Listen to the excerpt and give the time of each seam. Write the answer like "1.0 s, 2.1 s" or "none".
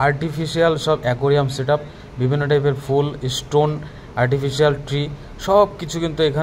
none

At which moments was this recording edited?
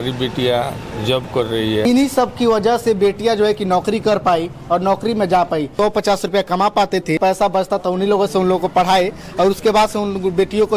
1.8 s, 5.7 s, 7.2 s

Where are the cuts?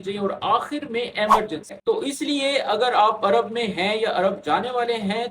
1.8 s

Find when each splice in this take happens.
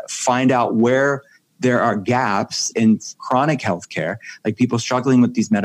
2.7 s

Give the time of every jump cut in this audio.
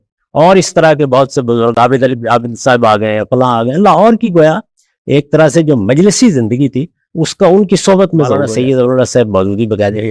8.5 s

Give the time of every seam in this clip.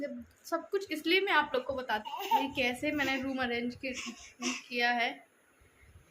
2.1 s

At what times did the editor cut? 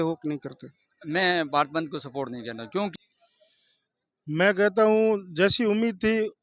2.9 s

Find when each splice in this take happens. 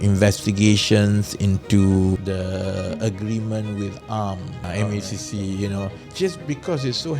2.2 s, 4.7 s, 6.0 s

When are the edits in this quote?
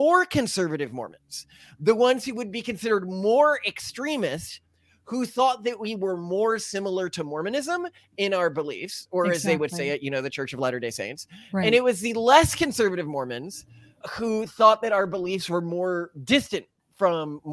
none

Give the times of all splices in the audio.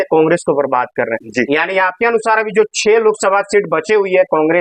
none

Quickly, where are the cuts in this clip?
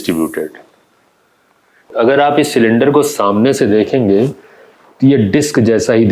1.9 s

